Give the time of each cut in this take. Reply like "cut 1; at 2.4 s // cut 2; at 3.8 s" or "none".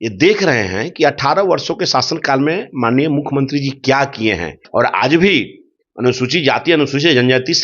cut 1; at 4.6 s